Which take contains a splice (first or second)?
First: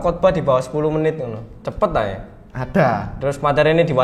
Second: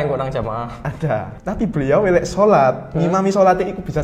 second